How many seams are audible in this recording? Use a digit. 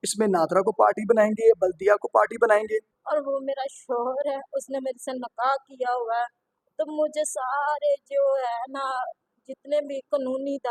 1